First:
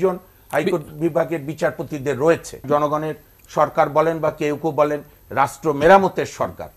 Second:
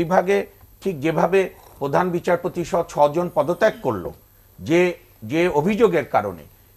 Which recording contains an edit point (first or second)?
first